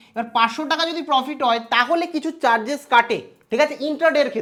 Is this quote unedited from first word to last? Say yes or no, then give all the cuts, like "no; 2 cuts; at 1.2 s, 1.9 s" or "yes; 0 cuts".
yes; 0 cuts